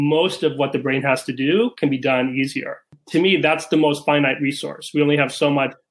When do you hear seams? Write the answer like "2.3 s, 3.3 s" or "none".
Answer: 2.9 s